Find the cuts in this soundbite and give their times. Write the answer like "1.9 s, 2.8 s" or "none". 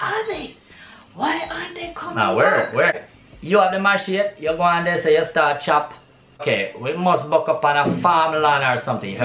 3.0 s, 6.4 s